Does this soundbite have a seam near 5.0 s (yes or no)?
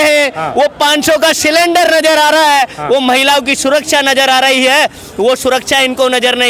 no